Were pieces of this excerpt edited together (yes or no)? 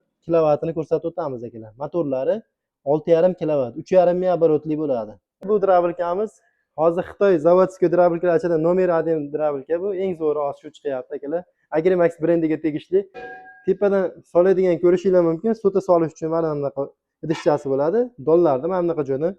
yes